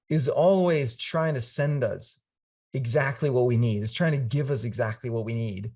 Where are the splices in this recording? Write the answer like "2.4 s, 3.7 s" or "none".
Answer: none